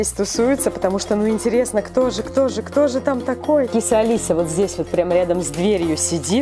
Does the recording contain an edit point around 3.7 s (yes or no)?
yes